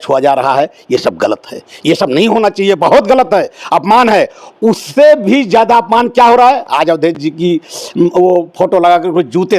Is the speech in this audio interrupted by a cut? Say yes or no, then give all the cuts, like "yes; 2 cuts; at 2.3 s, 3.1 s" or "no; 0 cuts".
no; 0 cuts